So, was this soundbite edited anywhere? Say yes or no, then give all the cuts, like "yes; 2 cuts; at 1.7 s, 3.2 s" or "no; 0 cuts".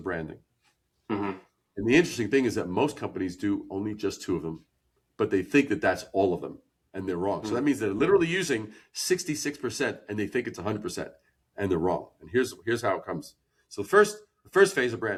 no; 0 cuts